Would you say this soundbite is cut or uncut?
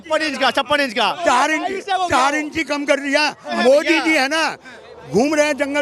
cut